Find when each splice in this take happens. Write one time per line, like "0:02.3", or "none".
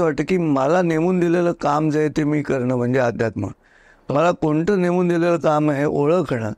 none